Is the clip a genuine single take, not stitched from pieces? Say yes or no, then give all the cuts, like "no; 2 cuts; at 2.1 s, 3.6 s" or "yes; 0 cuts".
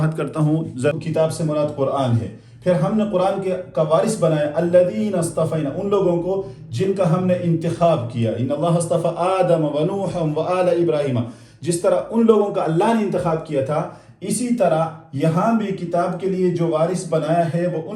no; 1 cut; at 0.9 s